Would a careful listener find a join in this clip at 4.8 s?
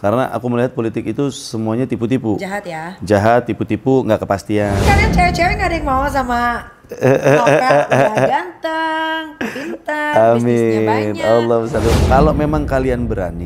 yes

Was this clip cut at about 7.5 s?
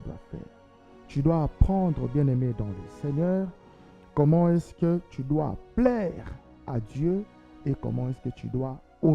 no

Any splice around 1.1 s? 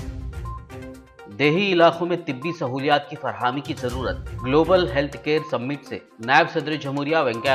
yes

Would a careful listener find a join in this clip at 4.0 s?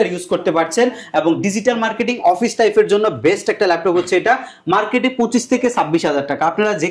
no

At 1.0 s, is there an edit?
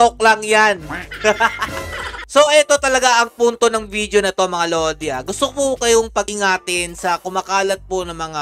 no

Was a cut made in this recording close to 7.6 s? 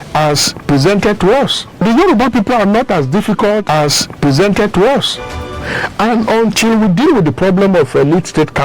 no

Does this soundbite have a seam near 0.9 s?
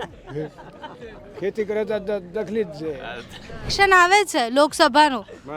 no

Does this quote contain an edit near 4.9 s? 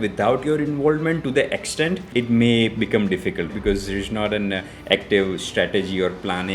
no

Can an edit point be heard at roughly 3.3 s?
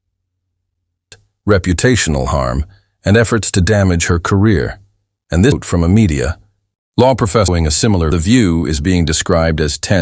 no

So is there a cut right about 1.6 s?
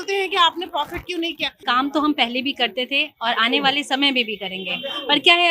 yes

